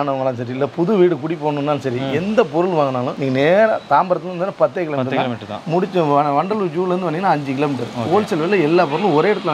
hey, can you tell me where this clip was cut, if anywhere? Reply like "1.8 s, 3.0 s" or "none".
3.1 s